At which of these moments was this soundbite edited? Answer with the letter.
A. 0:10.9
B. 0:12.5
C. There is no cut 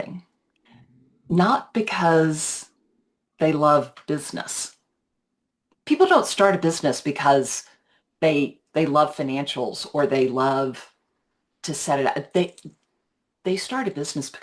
C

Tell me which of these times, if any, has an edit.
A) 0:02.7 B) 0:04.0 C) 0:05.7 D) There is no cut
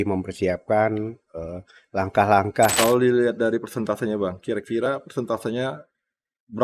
A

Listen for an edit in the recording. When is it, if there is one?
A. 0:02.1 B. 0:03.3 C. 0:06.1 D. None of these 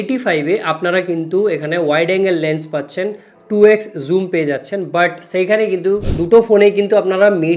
C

